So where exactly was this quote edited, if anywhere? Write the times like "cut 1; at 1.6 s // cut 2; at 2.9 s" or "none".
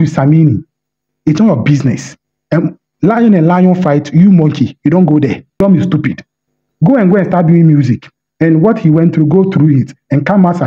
cut 1; at 5.4 s